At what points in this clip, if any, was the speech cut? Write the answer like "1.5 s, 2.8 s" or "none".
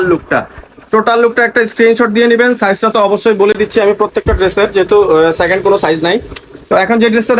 none